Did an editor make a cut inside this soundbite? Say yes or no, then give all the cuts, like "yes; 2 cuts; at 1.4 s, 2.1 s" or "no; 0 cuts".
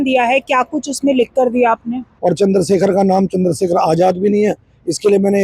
yes; 1 cut; at 2.0 s